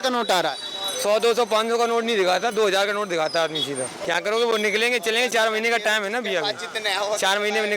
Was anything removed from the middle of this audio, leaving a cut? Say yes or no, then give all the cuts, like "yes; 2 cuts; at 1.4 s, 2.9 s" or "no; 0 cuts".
yes; 1 cut; at 3.9 s